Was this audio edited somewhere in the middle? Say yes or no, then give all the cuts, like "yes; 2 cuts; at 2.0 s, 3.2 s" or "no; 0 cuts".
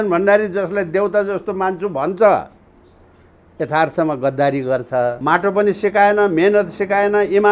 yes; 1 cut; at 5.2 s